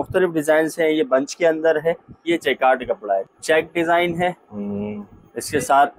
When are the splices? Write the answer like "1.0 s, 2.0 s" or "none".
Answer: 2.2 s, 3.3 s